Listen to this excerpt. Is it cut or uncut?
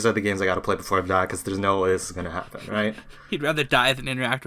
cut